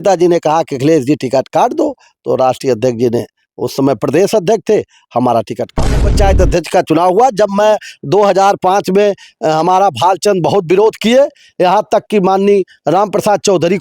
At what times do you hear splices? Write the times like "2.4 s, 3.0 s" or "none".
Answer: 6.0 s